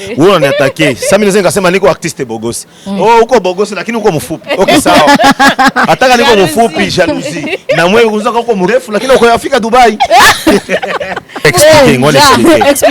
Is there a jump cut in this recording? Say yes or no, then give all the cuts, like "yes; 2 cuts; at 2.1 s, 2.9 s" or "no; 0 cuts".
yes; 1 cut; at 11.5 s